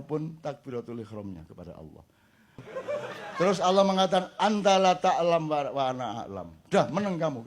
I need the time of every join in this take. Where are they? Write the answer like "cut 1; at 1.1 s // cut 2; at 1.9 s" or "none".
cut 1; at 2.6 s